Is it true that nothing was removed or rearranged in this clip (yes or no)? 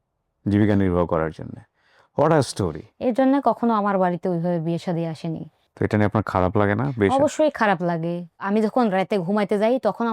no